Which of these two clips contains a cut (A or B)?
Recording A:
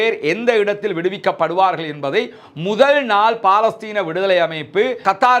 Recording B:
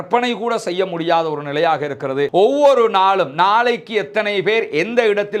B